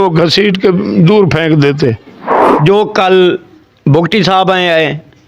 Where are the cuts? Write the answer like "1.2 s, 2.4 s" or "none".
2.3 s